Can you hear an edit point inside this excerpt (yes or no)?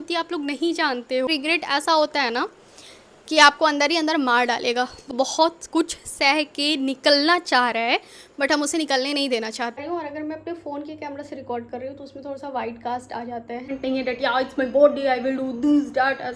yes